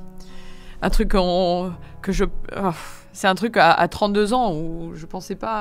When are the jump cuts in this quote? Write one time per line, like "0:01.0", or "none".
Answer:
none

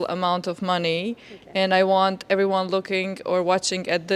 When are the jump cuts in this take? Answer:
none

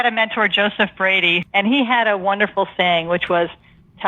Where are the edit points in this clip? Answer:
0:01.4

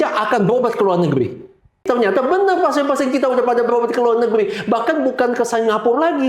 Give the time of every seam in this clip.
0:01.8

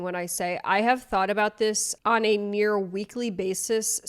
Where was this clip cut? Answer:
none

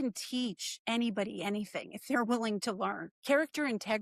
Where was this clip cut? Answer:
0:03.1

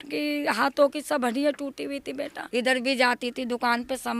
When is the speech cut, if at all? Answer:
0:02.3

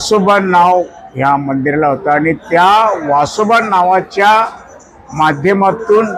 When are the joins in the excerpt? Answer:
none

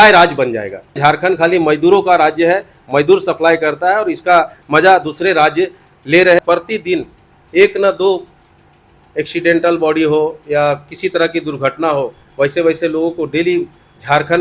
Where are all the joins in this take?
0:01.0
0:06.4

